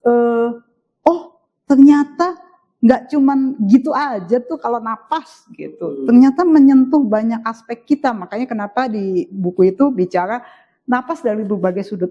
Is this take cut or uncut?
uncut